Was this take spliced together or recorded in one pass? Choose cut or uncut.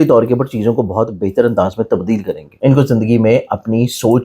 cut